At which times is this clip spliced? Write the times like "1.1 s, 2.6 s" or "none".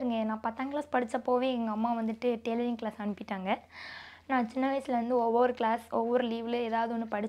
none

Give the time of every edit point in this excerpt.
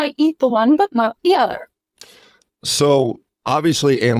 none

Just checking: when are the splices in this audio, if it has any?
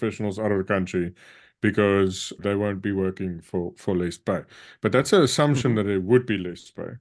2.4 s

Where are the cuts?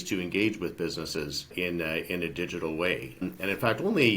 1.4 s

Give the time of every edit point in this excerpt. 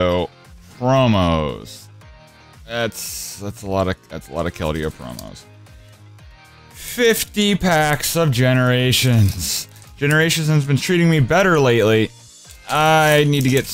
none

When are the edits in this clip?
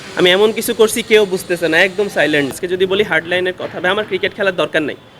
2.6 s

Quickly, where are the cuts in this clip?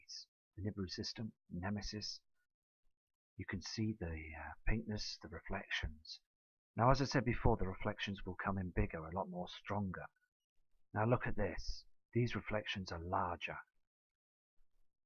2.8 s

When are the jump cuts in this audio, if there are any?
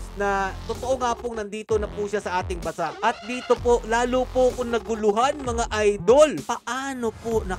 6.4 s

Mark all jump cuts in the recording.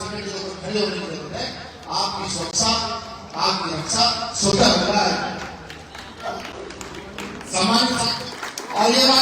8.1 s

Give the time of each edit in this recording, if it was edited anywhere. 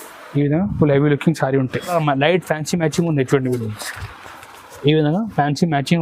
1.9 s

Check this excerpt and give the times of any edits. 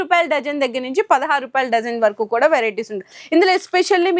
none

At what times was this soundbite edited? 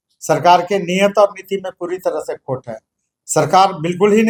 none

